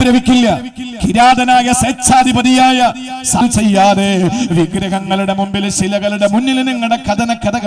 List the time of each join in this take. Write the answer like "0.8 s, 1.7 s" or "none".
3.4 s